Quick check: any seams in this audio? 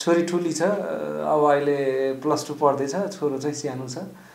no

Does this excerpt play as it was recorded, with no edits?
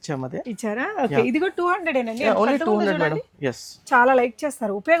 yes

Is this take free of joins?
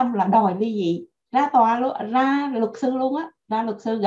yes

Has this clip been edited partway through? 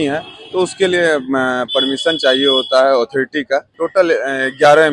yes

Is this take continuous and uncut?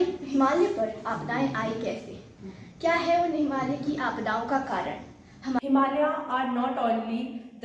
no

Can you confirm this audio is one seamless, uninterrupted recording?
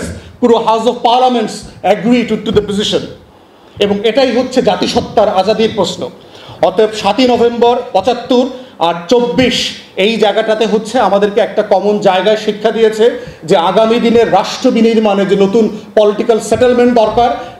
yes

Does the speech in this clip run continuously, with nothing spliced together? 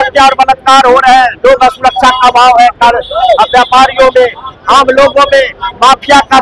yes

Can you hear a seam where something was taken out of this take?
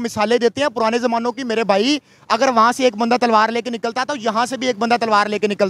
no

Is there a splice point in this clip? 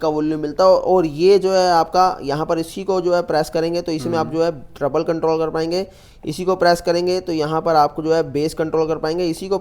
no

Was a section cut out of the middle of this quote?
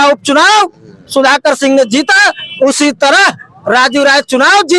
no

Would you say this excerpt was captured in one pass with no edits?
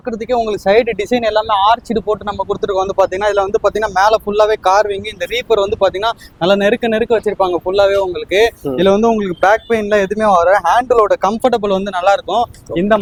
yes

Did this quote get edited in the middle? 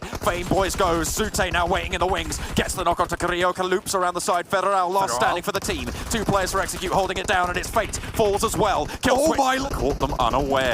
yes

